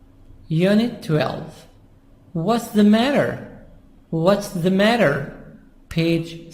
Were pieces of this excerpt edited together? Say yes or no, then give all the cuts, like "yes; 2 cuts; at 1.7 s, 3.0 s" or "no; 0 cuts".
yes; 1 cut; at 1.0 s